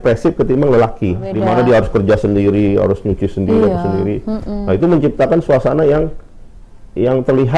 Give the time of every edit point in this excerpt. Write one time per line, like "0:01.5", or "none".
0:01.3